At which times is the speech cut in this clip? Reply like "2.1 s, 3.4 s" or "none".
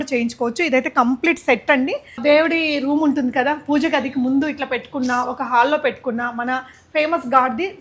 2.2 s